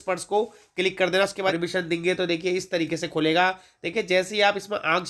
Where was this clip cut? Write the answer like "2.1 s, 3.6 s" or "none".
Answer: 1.5 s